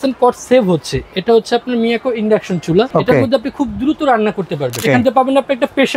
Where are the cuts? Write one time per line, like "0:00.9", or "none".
0:02.9
0:04.8